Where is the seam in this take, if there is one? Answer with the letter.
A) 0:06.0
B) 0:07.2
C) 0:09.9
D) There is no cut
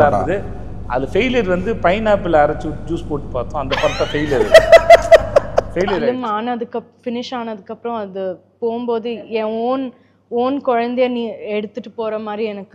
A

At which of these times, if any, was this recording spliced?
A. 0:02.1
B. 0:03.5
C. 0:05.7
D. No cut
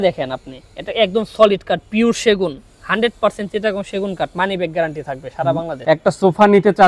C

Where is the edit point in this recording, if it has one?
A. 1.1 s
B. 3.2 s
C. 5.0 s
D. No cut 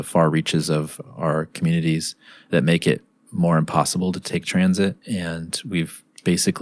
C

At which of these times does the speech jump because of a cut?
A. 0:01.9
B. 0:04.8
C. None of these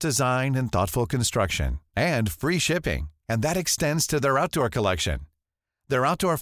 C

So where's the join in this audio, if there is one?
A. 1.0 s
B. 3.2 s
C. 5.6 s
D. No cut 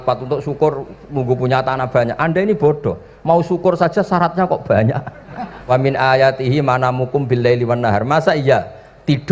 C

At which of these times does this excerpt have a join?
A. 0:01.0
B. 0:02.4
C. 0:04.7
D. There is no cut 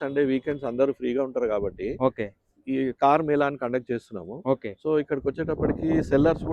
D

